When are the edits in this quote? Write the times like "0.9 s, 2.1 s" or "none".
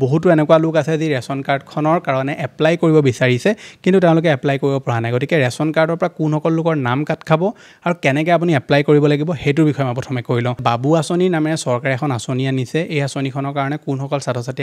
10.6 s